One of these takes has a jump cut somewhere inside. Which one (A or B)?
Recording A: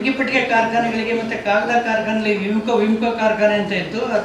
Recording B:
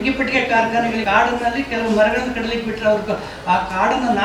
B